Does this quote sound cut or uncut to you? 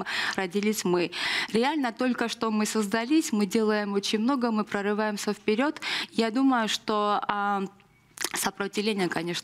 cut